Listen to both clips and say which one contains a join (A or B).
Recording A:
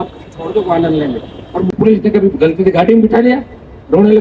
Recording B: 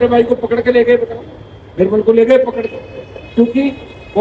A